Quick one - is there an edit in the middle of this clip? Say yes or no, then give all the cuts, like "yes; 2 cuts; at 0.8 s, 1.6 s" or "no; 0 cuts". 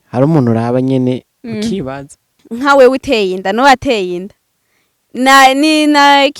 yes; 1 cut; at 2.4 s